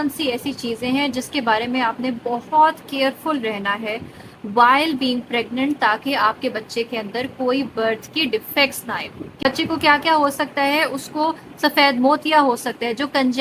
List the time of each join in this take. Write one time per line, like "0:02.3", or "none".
0:09.4

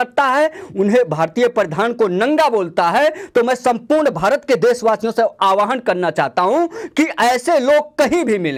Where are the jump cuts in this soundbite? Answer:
none

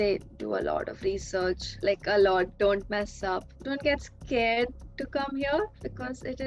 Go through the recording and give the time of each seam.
0:01.7
0:03.5

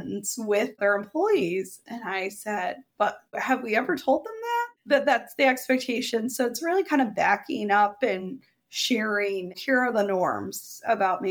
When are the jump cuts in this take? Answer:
0:00.7
0:04.7
0:09.6

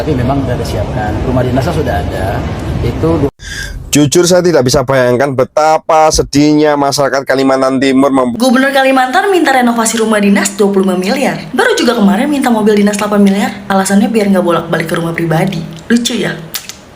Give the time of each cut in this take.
0:08.3

